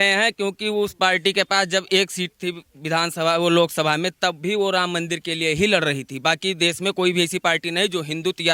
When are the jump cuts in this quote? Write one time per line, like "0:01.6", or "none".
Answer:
none